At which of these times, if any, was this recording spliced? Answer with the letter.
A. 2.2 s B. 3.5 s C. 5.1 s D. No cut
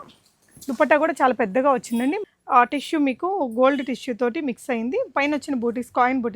A